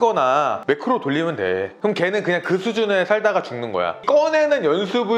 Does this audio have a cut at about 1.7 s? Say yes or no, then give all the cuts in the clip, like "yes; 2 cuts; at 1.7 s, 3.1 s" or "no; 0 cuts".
no; 1 cut; at 4.0 s